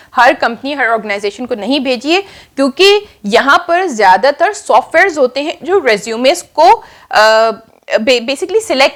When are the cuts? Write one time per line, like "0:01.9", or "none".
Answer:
none